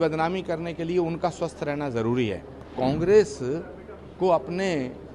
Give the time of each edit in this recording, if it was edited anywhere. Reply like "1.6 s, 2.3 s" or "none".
2.7 s